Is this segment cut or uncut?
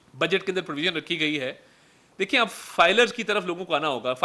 uncut